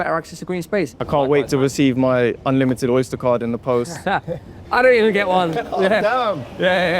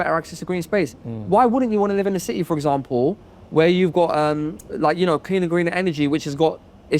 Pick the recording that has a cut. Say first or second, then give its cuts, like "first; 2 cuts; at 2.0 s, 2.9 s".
first; 1 cut; at 1.0 s